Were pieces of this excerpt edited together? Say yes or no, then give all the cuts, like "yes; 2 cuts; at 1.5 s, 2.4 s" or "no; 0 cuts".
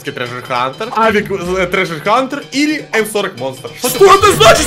no; 0 cuts